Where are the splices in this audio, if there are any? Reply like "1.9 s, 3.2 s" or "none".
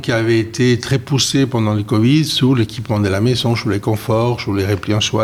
none